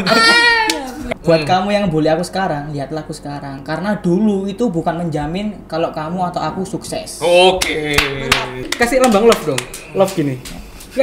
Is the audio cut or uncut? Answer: cut